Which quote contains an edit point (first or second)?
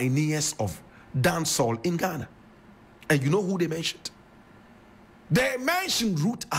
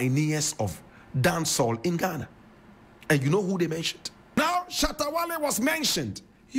second